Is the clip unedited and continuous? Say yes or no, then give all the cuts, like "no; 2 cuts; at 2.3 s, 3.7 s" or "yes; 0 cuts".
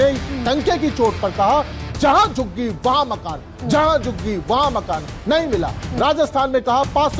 yes; 0 cuts